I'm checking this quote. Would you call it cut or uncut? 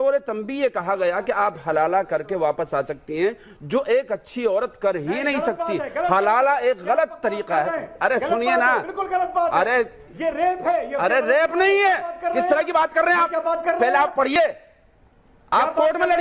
uncut